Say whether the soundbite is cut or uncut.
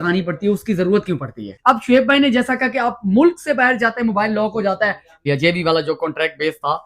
cut